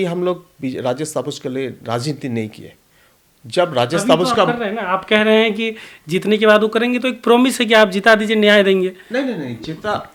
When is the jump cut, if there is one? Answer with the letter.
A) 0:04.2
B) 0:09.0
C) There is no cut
C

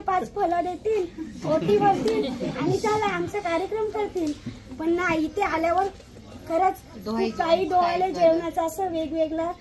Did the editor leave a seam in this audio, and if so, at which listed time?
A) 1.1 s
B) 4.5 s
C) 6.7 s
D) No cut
D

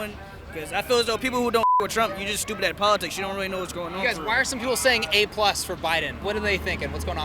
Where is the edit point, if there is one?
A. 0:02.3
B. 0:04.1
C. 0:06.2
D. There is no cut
C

